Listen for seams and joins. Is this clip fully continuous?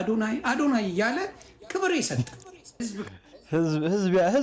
no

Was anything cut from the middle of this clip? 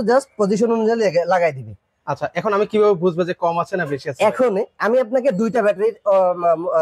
no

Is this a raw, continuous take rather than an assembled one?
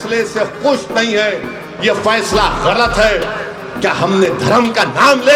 yes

